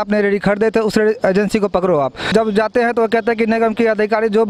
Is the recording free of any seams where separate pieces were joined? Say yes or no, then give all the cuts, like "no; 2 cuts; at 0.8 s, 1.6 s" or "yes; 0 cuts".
no; 1 cut; at 2.3 s